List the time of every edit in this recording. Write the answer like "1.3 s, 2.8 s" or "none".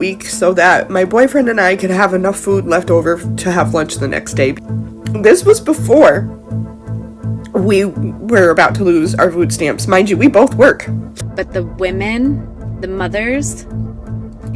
11.2 s

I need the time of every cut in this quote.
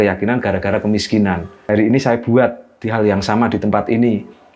1.5 s

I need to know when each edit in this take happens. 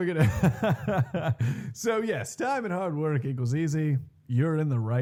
none

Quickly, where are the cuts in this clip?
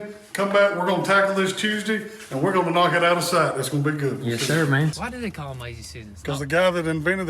5.0 s

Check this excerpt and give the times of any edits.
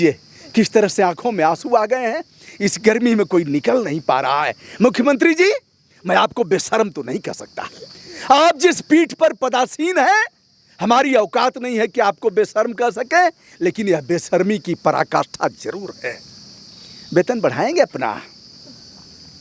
none

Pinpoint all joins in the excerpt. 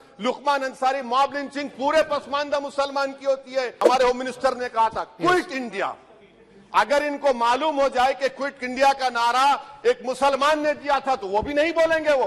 3.8 s

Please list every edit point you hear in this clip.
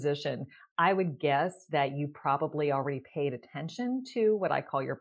none

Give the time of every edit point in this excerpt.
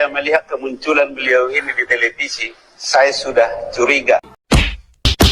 4.3 s

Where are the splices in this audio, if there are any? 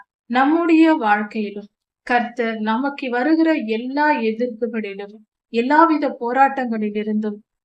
none

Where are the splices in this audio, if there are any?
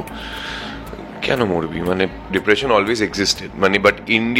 2.2 s

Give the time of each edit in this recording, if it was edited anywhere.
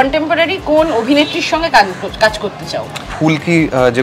3.1 s

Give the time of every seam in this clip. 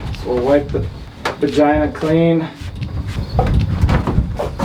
3.2 s

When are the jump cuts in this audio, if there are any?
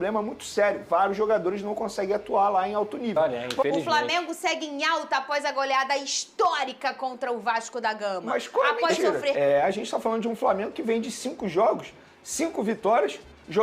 3.2 s, 9.3 s

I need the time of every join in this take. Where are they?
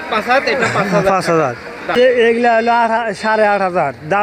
1.9 s

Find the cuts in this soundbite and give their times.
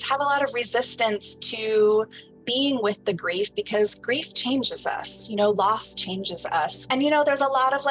6.8 s

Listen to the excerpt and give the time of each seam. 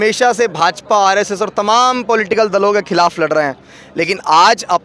none

